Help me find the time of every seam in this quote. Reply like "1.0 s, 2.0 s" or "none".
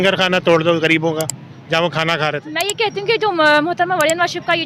2.5 s

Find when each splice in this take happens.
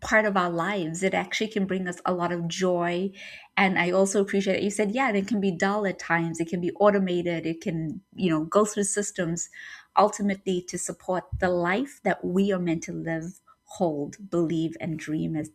none

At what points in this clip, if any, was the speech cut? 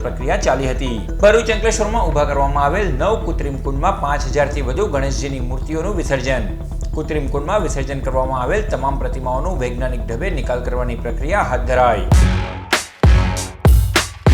12.0 s

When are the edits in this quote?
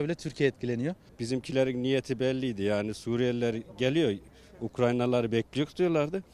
1.0 s

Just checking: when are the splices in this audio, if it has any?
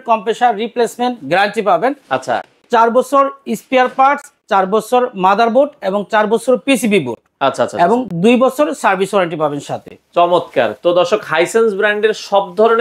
none

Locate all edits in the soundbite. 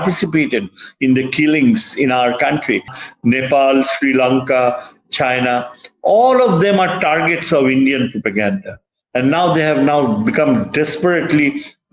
3.0 s

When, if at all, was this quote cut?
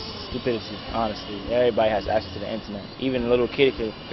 none

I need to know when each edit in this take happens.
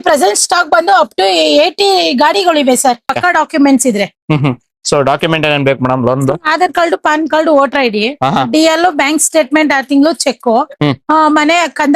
3.1 s

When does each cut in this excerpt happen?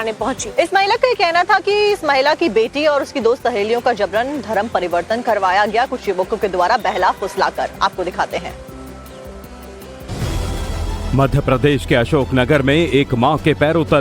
4.0 s

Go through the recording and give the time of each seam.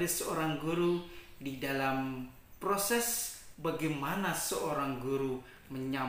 none

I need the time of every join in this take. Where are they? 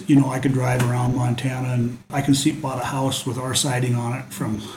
2.1 s

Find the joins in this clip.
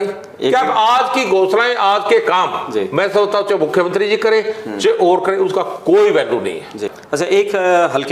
7.0 s

